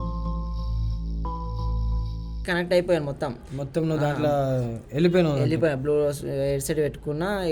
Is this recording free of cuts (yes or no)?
no